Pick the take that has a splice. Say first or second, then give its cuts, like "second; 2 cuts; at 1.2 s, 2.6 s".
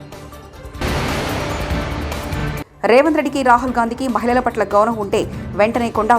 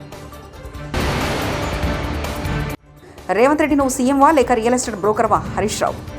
second; 2 cuts; at 0.8 s, 2.8 s